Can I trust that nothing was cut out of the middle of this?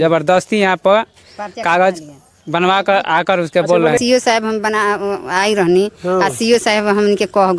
no; 1 cut; at 4.0 s

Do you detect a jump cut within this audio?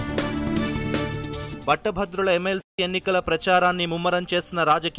yes; 1 cut; at 1.1 s

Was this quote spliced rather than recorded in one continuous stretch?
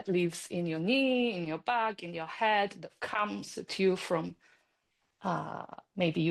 no; 0 cuts

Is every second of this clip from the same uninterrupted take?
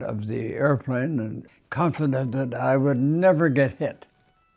no; 1 cut; at 1.4 s

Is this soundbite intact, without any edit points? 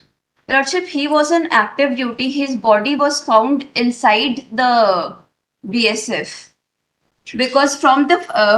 yes; 0 cuts

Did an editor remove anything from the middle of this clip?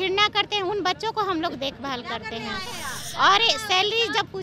no; 0 cuts

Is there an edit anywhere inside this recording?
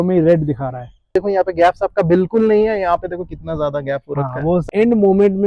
yes; 2 cuts; at 1.1 s, 4.6 s

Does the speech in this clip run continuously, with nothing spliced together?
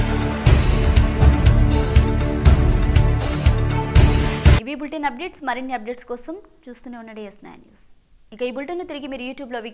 yes; 0 cuts

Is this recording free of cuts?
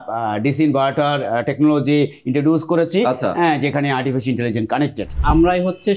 no; 1 cut; at 5.1 s

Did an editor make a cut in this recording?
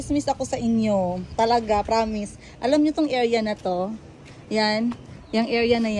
no; 0 cuts

